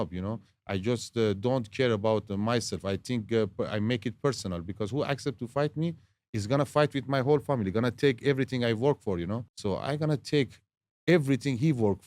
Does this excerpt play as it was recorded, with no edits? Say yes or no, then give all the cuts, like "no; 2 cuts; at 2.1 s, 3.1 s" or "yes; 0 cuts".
no; 1 cut; at 9.5 s